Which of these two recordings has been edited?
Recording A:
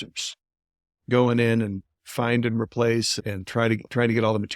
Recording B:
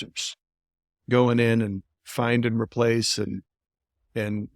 A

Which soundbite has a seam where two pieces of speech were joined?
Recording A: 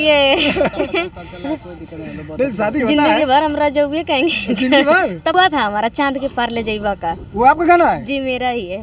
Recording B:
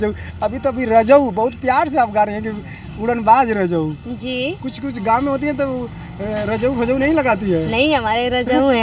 A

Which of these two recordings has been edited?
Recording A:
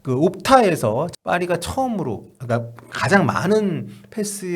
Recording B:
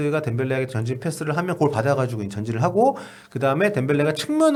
A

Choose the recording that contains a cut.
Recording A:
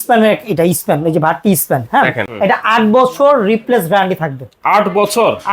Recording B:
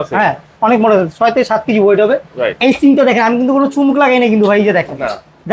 A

